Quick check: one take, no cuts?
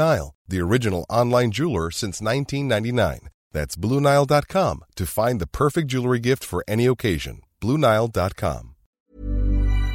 no; 1 cut; at 9.0 s

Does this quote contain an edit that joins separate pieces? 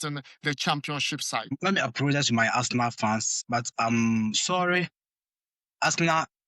yes; 1 cut; at 1.5 s

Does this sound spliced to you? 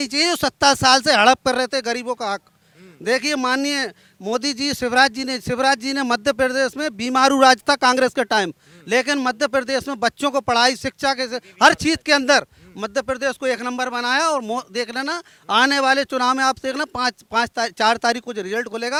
no; 0 cuts

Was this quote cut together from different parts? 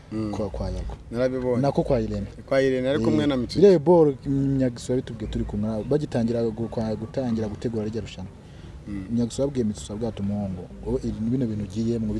no; 0 cuts

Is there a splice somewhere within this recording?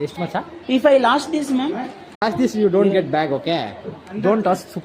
yes; 1 cut; at 2.2 s

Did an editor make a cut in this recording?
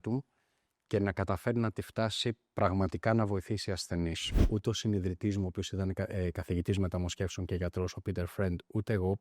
yes; 1 cut; at 4.4 s

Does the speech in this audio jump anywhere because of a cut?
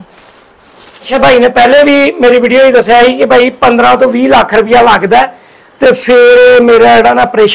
yes; 1 cut; at 1.1 s

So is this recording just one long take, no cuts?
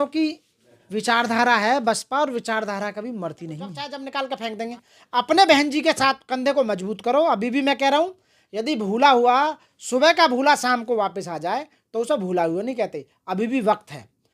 no; 1 cut; at 3.9 s

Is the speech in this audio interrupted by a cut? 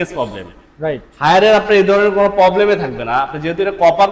no; 0 cuts

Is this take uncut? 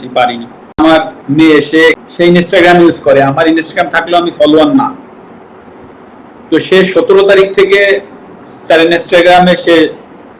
no; 2 cuts; at 1.1 s, 2.1 s

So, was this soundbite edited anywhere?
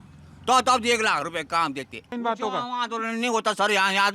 yes; 1 cut; at 2.1 s

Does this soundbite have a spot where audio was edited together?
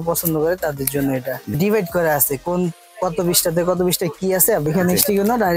yes; 2 cuts; at 1.5 s, 4.7 s

